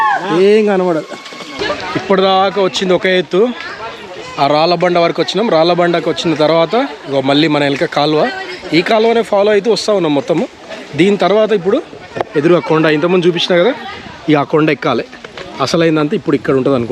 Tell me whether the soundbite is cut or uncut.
cut